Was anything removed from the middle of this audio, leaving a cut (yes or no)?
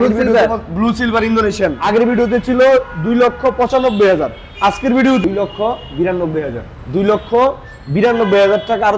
yes